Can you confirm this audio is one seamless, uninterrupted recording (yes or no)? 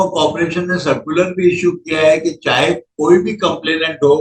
yes